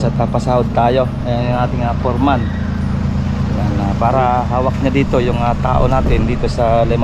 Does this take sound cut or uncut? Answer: uncut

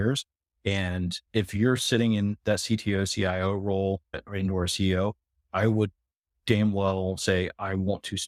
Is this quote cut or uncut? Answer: uncut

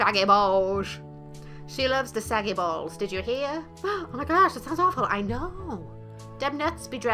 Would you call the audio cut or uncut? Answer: uncut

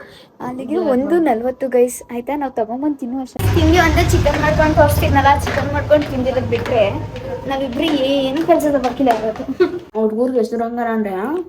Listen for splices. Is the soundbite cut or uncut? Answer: cut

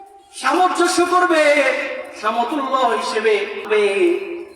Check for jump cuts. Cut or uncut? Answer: cut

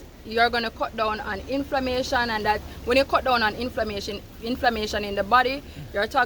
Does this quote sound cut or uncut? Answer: uncut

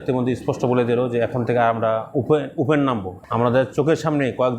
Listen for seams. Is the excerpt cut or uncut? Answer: cut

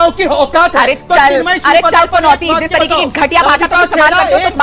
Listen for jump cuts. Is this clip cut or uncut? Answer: uncut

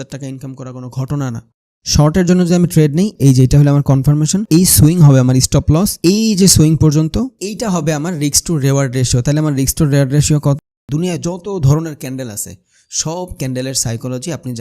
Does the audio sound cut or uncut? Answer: cut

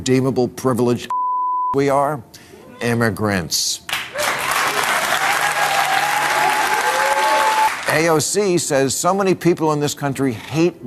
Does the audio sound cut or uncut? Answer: cut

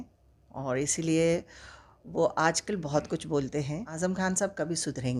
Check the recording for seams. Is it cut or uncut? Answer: cut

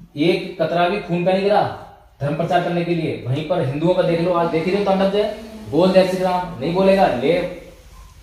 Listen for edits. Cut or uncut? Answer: uncut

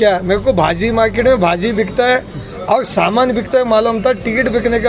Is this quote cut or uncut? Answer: uncut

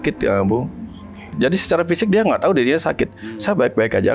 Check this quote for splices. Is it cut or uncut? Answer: cut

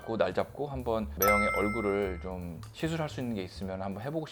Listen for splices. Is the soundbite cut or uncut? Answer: uncut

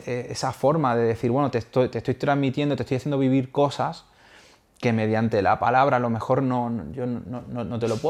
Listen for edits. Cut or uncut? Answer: uncut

